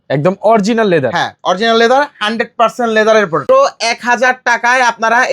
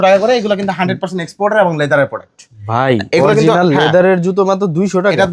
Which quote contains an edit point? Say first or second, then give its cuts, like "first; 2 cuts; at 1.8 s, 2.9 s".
first; 1 cut; at 3.5 s